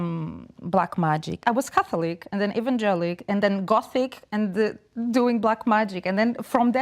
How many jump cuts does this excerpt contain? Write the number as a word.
one